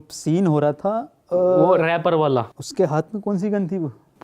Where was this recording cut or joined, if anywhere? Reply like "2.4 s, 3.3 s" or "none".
2.5 s